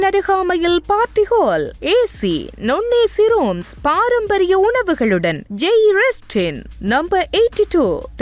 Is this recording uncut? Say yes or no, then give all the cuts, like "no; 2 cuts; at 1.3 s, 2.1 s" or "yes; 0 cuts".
yes; 0 cuts